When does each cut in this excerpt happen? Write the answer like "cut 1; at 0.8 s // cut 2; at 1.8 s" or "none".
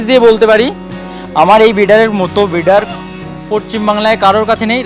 none